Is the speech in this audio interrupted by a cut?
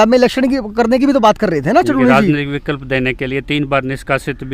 no; 0 cuts

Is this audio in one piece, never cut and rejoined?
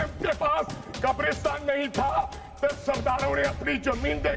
yes; 0 cuts

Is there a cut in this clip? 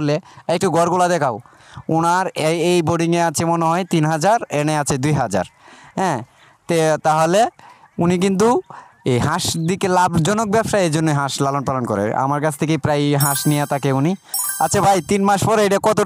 yes; 1 cut; at 14.4 s

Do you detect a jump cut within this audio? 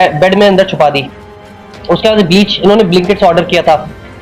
no; 0 cuts

